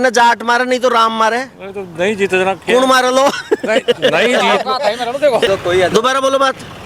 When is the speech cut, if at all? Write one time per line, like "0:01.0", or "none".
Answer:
0:05.5